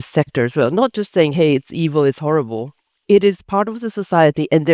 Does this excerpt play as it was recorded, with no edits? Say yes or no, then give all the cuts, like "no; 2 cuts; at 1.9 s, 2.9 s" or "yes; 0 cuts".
yes; 0 cuts